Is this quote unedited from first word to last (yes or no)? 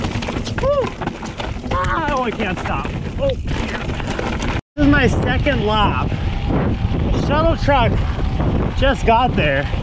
yes